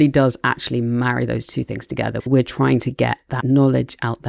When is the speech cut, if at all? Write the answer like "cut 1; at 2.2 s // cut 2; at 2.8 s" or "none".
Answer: cut 1; at 2.2 s